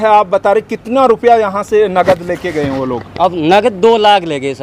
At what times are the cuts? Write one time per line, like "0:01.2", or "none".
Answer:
none

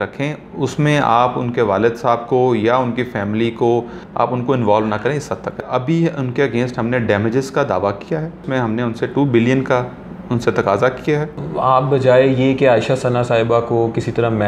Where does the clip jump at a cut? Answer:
0:04.0
0:05.6
0:08.4
0:11.4

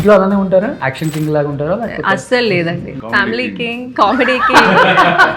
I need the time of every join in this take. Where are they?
0:00.9
0:03.0

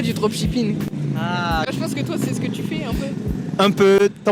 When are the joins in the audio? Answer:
none

